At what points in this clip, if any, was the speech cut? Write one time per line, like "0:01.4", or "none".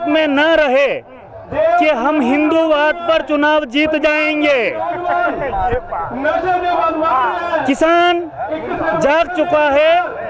none